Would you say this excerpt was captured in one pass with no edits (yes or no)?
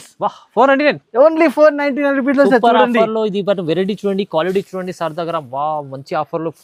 yes